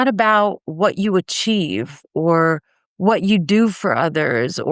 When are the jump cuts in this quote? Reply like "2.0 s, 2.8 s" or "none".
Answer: none